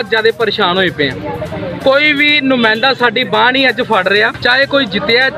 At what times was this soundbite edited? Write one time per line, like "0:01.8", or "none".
0:04.3